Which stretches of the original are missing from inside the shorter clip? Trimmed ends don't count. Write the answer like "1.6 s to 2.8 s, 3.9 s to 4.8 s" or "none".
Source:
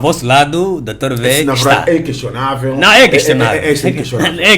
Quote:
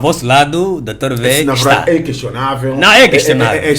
none